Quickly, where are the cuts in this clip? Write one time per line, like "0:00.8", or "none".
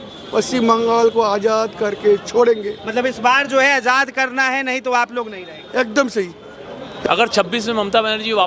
0:07.0